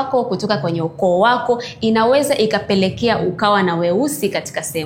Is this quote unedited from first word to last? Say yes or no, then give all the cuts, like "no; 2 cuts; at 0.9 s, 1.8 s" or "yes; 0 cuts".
yes; 0 cuts